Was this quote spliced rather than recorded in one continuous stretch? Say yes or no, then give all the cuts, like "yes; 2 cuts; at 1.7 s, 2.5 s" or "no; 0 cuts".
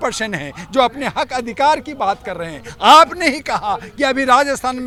no; 0 cuts